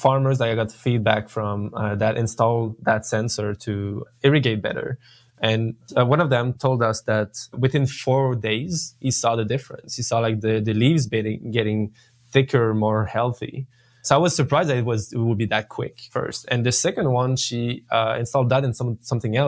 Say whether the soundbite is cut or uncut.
uncut